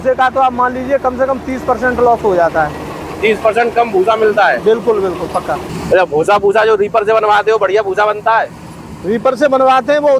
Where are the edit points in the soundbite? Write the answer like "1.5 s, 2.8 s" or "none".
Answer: 5.7 s